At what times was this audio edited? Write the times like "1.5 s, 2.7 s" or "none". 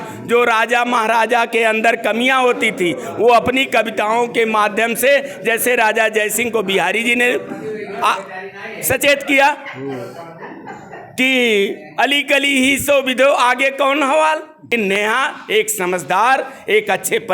14.7 s